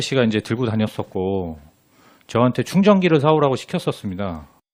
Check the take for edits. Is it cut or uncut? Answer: uncut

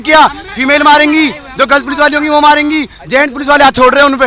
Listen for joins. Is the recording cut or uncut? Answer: uncut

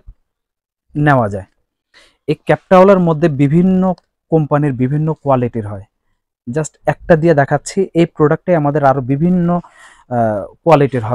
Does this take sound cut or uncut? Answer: uncut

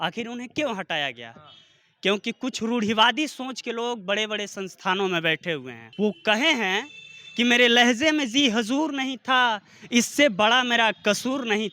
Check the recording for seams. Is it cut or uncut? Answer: cut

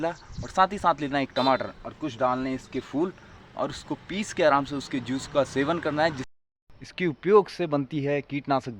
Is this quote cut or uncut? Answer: cut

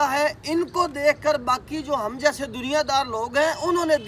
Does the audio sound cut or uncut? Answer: uncut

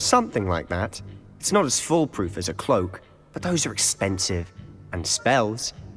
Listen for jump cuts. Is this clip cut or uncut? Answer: uncut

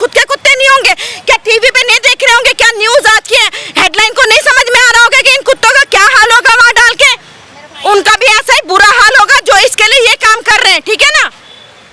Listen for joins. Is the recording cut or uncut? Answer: uncut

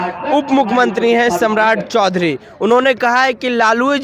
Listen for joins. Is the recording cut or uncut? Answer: uncut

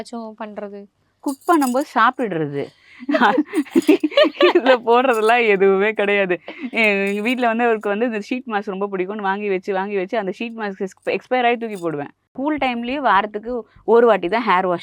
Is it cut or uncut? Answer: cut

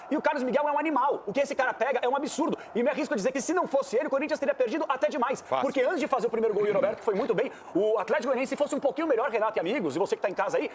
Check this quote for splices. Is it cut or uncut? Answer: uncut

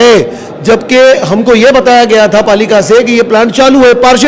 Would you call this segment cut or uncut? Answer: uncut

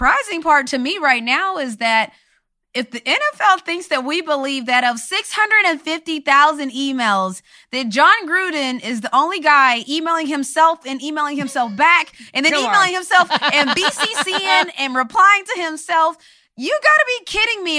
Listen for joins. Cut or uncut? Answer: uncut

